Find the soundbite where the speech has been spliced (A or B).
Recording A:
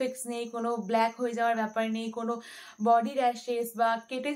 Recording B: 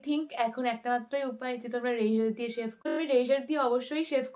B